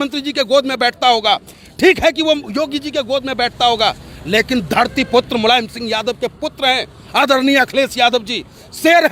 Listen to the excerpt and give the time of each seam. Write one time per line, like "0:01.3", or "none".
none